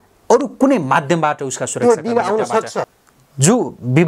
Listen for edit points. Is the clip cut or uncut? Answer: cut